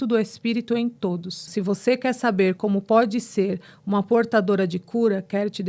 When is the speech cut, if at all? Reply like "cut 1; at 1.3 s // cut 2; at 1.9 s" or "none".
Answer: cut 1; at 1.5 s

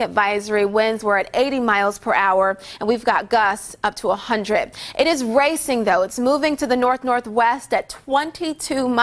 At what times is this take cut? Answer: cut 1; at 2.1 s

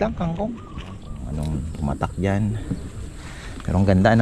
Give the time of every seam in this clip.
cut 1; at 1.1 s

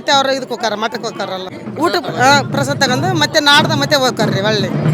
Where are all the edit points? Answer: cut 1; at 1.5 s

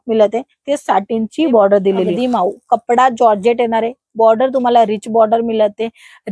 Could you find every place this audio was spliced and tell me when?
cut 1; at 2.1 s

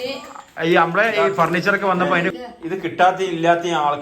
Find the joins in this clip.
cut 1; at 2.3 s

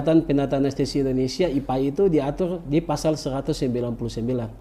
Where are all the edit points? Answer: none

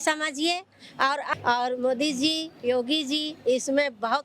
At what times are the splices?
cut 1; at 1.3 s

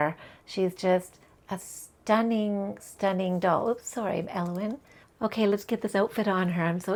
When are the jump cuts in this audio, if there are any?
none

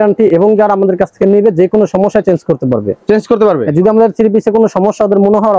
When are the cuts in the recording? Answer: none

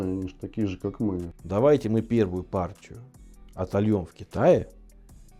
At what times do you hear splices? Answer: cut 1; at 1.3 s

